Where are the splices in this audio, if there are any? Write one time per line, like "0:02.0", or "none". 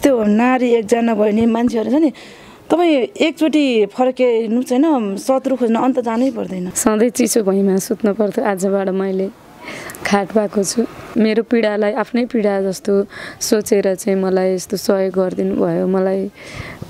0:06.6
0:11.1